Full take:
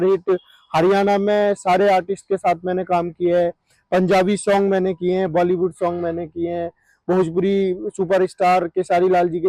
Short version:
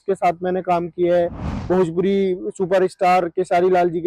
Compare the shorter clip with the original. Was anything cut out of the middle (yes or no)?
yes